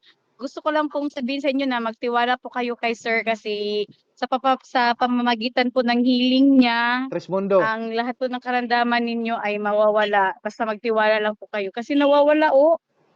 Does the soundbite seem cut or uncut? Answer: uncut